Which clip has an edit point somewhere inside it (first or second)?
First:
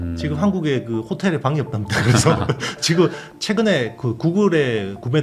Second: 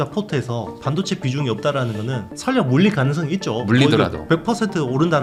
first